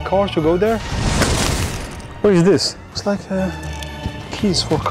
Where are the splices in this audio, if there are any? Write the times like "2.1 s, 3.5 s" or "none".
0.9 s, 2.8 s